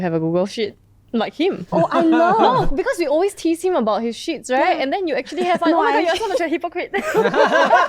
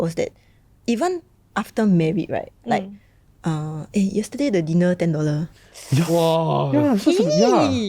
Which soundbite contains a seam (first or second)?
second